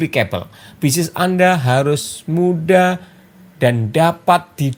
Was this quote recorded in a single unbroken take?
yes; 0 cuts

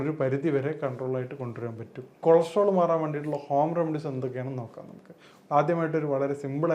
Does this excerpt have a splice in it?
yes; 1 cut; at 2.2 s

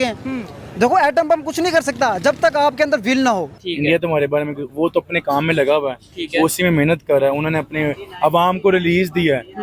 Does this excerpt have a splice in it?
yes; 1 cut; at 3.5 s

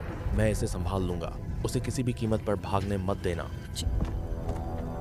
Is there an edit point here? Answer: yes; 1 cut; at 3.6 s

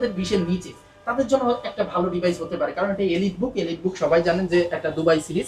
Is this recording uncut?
yes; 0 cuts

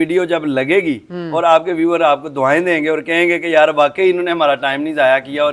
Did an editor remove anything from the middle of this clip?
no; 0 cuts

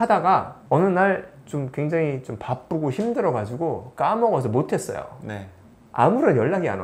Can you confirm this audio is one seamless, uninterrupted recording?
yes; 0 cuts

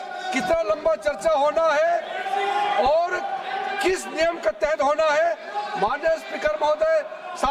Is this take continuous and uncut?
yes; 0 cuts

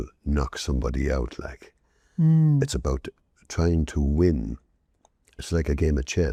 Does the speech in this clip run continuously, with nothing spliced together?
yes; 0 cuts

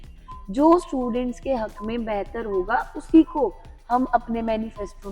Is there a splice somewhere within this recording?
no; 0 cuts

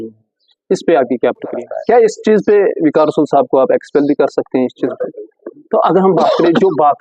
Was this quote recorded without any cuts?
no; 2 cuts; at 1.7 s, 4.9 s

